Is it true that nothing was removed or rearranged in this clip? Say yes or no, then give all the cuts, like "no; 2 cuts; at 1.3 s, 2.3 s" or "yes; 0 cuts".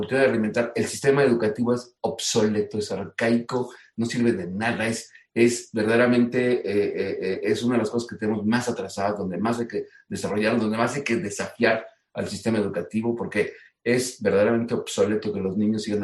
yes; 0 cuts